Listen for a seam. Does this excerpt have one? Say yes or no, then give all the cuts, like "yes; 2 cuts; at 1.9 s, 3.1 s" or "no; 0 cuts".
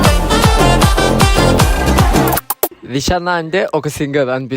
yes; 1 cut; at 2.8 s